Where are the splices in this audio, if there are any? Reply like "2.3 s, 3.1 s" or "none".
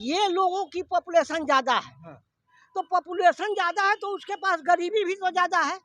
none